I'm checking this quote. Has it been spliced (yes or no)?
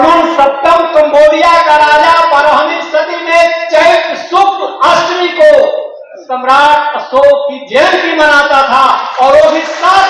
no